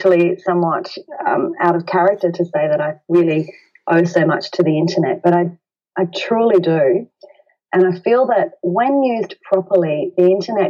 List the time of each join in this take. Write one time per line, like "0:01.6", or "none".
none